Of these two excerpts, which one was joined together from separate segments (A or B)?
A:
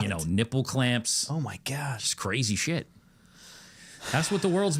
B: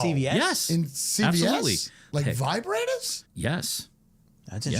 B